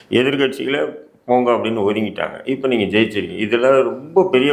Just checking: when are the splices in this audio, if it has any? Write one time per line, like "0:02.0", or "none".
none